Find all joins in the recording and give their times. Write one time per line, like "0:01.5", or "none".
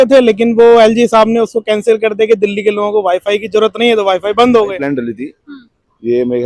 0:04.9